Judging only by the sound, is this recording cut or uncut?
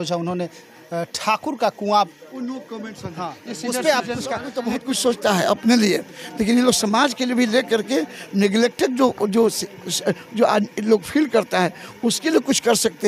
cut